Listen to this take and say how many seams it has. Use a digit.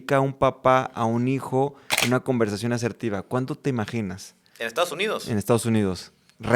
0